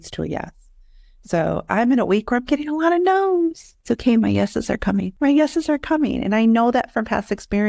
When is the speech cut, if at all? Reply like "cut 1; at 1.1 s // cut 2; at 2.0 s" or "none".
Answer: cut 1; at 3.7 s // cut 2; at 5.1 s